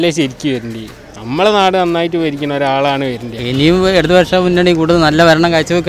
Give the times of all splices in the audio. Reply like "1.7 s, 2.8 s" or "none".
3.3 s